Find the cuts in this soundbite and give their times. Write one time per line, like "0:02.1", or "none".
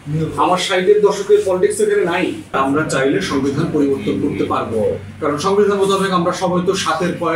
0:02.6